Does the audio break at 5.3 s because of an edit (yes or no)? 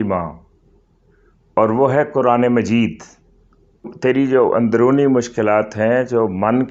no